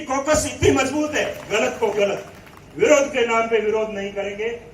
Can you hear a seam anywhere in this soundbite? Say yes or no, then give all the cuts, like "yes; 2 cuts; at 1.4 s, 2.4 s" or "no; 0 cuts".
yes; 1 cut; at 1.4 s